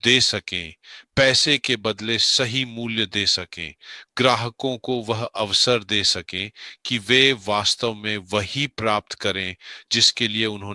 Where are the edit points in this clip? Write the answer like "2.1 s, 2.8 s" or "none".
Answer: none

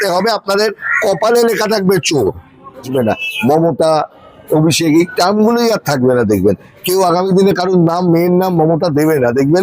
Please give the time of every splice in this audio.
2.9 s

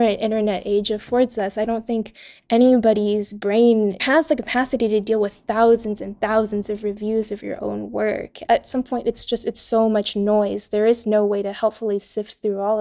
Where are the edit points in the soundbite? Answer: 4.0 s, 8.3 s

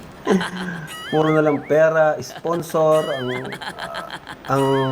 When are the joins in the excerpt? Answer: 2.8 s

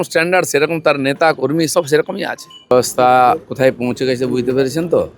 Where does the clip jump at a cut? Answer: 2.5 s

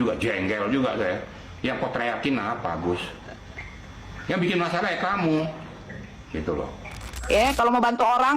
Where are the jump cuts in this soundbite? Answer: 7.1 s

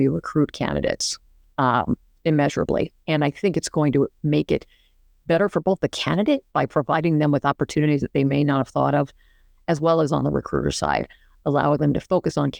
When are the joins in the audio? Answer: none

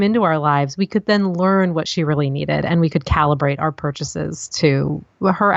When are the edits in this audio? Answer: none

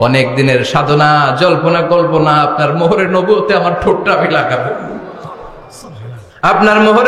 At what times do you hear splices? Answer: 6.2 s

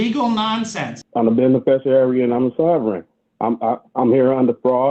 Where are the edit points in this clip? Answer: 1.0 s

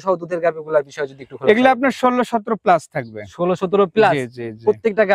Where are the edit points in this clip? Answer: none

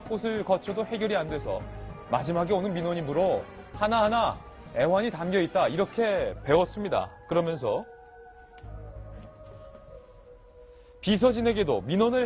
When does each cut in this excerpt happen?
5.6 s

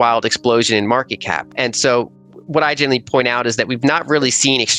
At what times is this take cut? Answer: 1.5 s

